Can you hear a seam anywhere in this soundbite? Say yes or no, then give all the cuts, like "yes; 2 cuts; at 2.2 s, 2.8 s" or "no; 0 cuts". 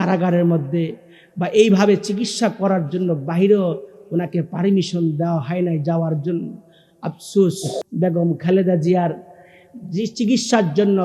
yes; 1 cut; at 7.7 s